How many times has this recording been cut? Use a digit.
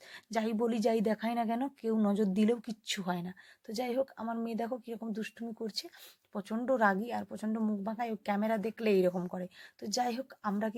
0